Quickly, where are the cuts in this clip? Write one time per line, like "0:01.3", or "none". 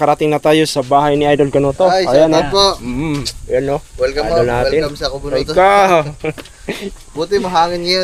none